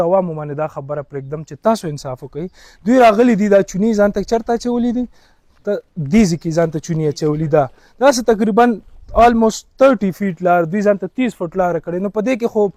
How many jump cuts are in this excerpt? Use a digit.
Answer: 0